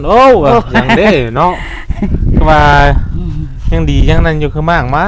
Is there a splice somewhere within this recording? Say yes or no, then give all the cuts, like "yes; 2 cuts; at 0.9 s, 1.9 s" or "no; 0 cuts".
no; 0 cuts